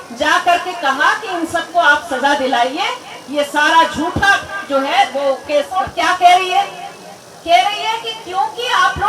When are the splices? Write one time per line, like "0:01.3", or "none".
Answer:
0:05.7